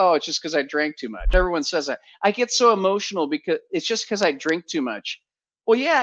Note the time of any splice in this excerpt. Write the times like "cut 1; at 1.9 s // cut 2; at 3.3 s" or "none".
cut 1; at 1.2 s